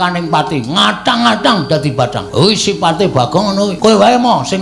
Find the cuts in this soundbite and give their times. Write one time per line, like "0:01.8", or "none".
0:02.2
0:03.7